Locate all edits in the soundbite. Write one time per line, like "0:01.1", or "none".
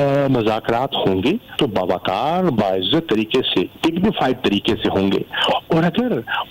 0:01.5
0:03.7

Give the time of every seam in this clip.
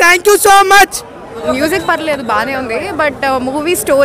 0:01.3

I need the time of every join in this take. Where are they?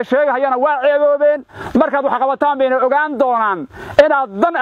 none

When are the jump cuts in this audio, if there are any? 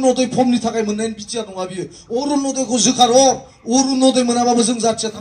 none

